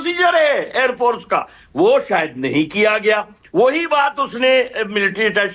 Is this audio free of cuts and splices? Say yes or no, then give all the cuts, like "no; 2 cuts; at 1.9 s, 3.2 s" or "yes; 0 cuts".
yes; 0 cuts